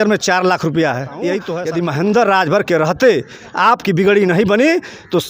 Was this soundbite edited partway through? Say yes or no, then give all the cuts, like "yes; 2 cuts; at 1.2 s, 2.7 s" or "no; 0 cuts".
yes; 1 cut; at 1.5 s